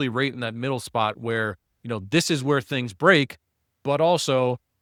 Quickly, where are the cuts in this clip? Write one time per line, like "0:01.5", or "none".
none